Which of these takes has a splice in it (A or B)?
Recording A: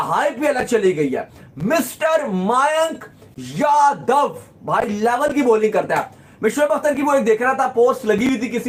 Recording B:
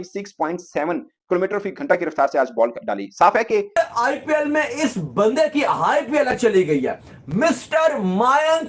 B